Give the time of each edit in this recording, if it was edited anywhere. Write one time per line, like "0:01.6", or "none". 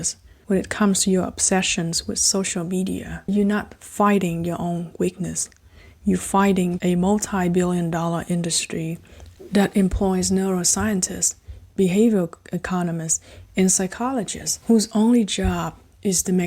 0:03.3
0:06.8